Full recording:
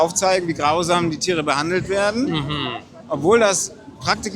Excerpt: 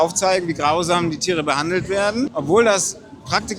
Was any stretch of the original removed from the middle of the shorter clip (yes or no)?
yes